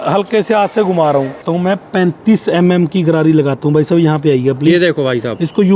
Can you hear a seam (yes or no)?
yes